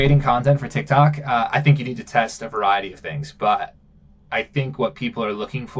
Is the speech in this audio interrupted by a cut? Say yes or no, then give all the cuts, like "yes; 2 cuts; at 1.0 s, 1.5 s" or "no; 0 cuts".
no; 0 cuts